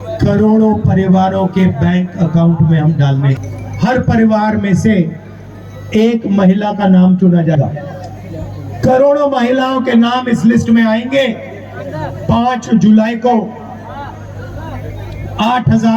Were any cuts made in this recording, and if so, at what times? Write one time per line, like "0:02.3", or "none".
0:03.4